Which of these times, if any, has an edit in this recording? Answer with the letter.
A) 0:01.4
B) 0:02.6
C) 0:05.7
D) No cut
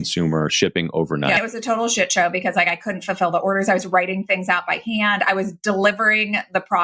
A